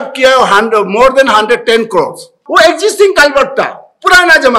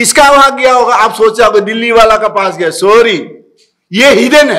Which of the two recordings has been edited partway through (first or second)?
first